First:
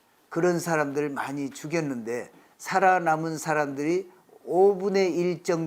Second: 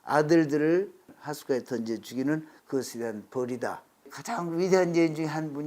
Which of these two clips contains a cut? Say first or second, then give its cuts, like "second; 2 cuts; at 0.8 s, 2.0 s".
second; 2 cuts; at 1.1 s, 4.1 s